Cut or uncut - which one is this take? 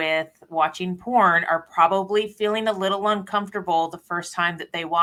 uncut